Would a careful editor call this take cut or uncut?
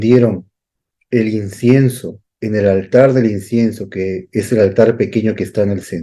uncut